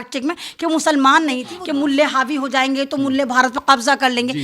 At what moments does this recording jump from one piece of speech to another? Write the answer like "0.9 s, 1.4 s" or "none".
1.5 s